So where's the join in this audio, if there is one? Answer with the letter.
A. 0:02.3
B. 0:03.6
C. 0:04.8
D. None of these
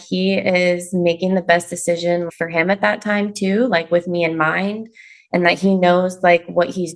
A